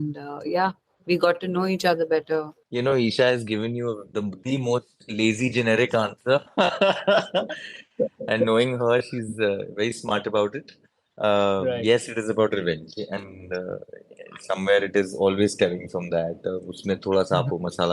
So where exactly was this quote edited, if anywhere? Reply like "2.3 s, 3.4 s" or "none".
2.6 s